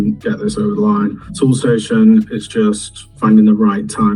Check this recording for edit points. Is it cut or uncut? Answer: uncut